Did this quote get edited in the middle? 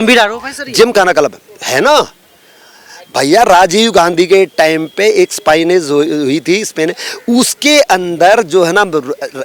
no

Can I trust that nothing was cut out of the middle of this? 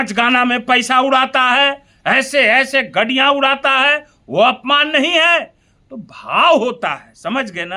yes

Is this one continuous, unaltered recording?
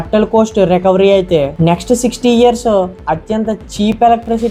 yes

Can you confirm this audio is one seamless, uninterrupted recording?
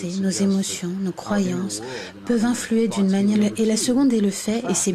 yes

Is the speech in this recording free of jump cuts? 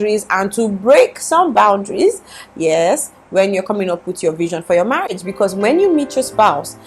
yes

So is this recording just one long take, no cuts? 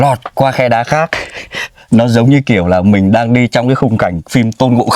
yes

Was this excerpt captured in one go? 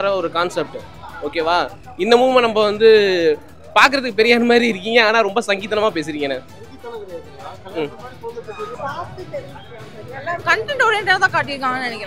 no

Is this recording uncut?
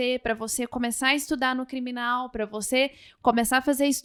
yes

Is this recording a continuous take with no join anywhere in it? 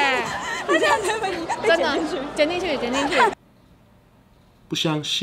yes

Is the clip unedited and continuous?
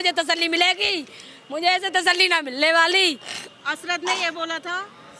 yes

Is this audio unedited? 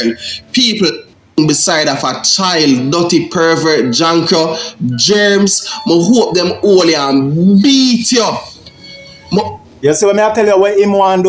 no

